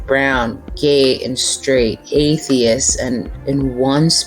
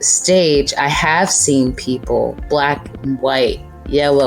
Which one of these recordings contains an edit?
first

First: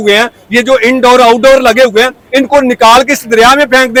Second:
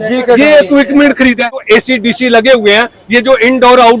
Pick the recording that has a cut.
second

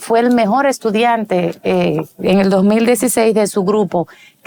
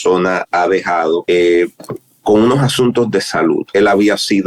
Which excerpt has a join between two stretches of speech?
second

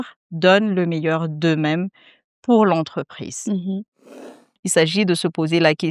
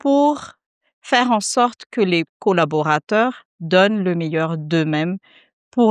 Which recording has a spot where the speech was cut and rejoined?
first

